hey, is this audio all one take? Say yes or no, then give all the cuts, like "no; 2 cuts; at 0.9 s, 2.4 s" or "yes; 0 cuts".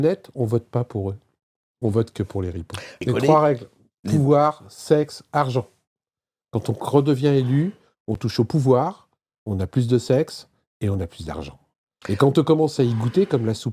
no; 1 cut; at 3.0 s